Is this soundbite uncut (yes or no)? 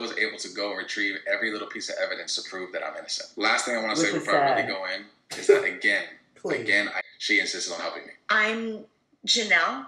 no